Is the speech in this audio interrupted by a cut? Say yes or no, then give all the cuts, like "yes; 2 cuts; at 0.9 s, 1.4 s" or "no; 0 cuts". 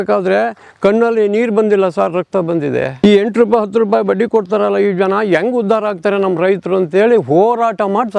yes; 1 cut; at 3.0 s